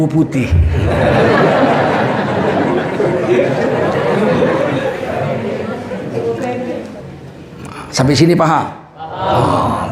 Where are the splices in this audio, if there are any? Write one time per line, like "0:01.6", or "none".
0:07.0